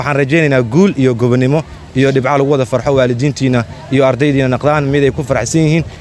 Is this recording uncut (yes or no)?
yes